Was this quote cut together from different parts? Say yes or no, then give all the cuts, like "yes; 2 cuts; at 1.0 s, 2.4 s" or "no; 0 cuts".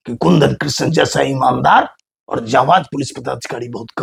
no; 0 cuts